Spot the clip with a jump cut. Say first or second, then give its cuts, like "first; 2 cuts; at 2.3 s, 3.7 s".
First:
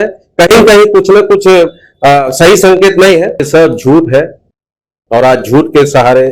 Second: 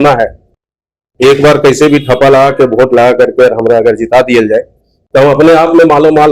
first; 1 cut; at 3.4 s